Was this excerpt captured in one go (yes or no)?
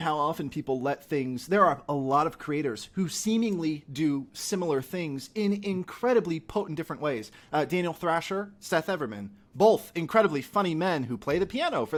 yes